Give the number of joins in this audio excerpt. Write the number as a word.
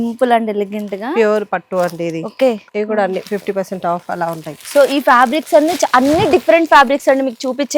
one